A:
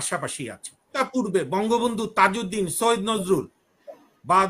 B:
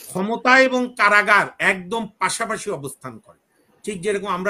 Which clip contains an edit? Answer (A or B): A